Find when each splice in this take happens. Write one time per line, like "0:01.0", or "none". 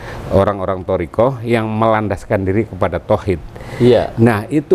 none